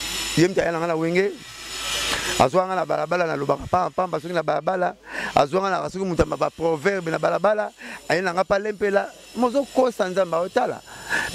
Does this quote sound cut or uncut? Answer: uncut